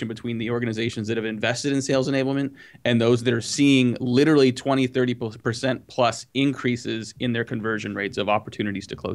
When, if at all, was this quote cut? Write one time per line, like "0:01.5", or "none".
none